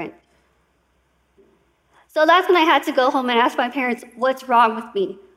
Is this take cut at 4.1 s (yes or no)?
no